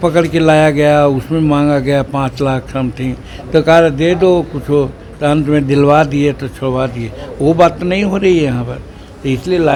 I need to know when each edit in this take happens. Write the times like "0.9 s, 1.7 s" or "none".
none